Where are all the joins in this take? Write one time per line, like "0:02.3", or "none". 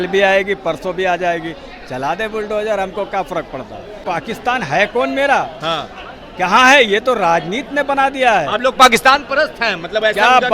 0:04.0